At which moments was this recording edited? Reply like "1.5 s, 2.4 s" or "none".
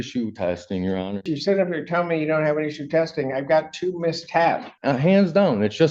1.3 s, 4.7 s